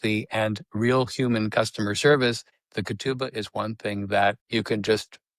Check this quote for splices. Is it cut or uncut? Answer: cut